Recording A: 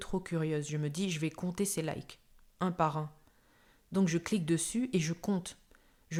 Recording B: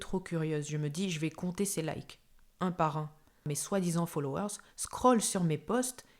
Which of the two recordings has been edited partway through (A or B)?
B